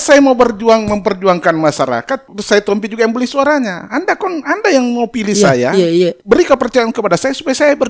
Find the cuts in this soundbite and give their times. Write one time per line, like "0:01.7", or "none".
0:02.3
0:06.2